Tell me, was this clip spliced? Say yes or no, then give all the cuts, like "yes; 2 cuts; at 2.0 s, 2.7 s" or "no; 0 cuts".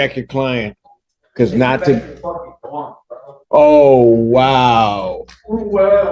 no; 0 cuts